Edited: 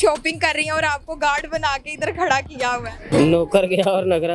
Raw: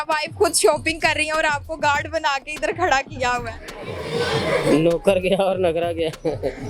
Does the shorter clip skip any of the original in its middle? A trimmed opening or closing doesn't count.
yes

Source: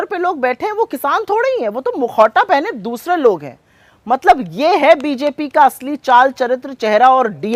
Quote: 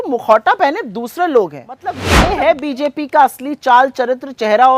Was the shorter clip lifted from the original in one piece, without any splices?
no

